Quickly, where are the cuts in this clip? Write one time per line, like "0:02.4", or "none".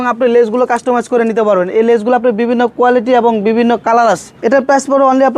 0:04.3